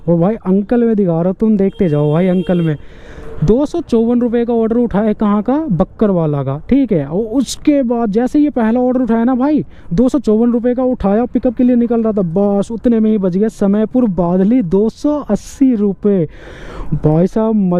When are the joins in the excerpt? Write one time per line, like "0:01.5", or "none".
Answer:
none

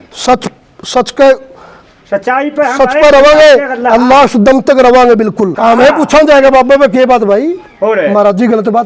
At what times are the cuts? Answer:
0:05.6

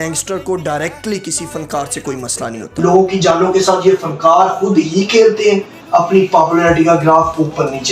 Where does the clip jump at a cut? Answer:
0:02.6

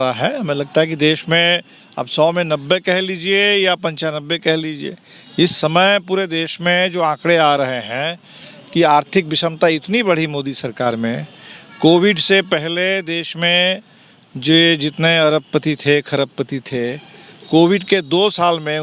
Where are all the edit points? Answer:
none

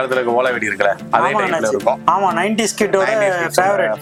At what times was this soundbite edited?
none

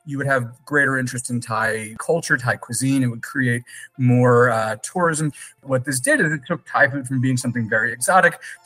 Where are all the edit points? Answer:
0:02.0
0:05.4

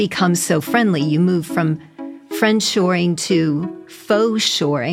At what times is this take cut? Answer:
none

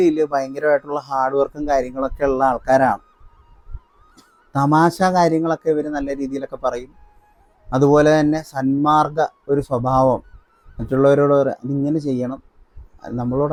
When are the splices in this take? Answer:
none

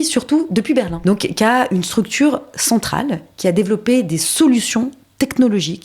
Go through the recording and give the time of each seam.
0:00.9

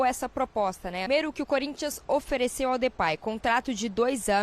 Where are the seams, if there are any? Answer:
0:01.1

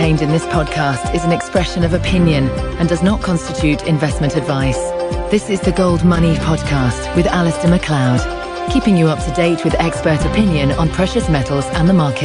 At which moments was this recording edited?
none

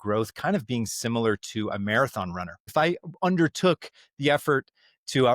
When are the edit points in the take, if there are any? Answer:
0:02.7

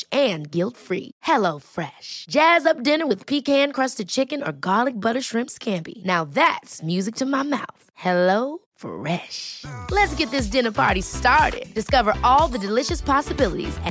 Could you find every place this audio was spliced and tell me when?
none

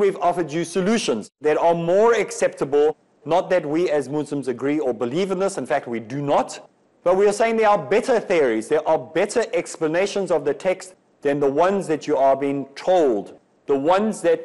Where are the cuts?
0:01.3

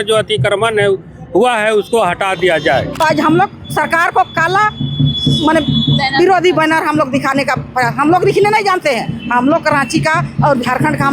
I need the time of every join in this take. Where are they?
0:02.9

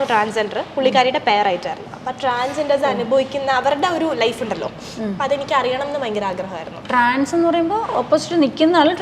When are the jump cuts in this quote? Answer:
none

